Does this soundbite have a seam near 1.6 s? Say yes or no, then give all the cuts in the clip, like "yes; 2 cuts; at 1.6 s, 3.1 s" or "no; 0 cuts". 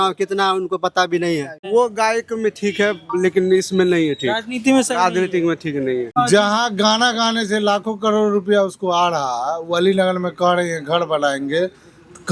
yes; 2 cuts; at 1.6 s, 6.1 s